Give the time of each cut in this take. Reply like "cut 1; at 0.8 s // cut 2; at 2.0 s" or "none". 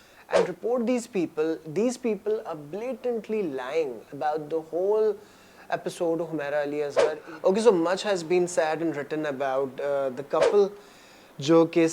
cut 1; at 6.9 s